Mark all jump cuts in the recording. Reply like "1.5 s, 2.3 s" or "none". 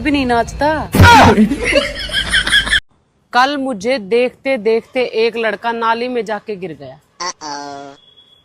2.9 s